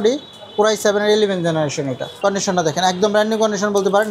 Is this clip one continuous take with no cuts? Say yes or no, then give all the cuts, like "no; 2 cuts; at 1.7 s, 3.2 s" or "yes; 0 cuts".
no; 1 cut; at 2.0 s